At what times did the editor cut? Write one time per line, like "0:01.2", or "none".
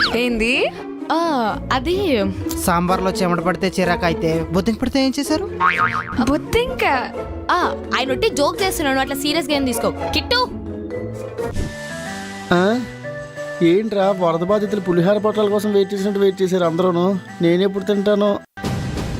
0:11.6